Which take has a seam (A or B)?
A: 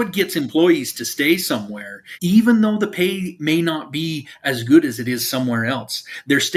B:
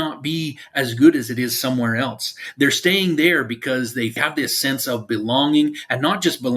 B